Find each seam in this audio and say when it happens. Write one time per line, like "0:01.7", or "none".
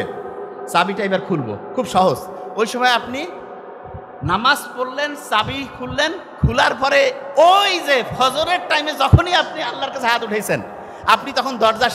0:02.3

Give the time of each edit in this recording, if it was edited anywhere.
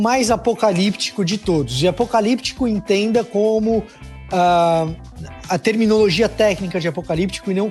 none

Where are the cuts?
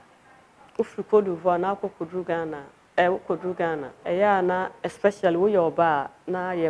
0:03.9

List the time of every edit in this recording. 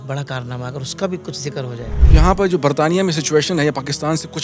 0:02.0

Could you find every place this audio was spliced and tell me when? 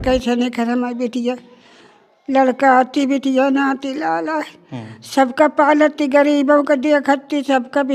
none

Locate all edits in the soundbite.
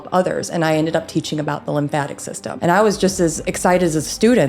0:02.5
0:03.4

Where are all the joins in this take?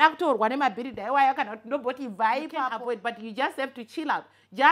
0:02.7

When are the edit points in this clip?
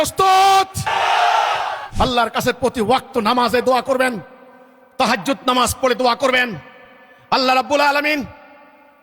0:01.9

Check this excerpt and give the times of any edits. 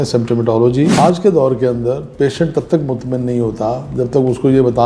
0:00.9

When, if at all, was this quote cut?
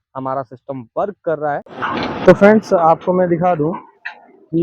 0:01.6

